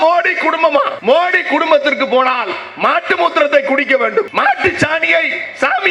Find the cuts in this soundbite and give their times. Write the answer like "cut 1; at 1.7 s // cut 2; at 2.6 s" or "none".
cut 1; at 0.9 s // cut 2; at 4.3 s